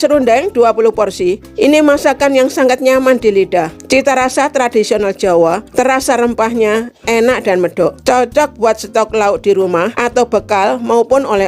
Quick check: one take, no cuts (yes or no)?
no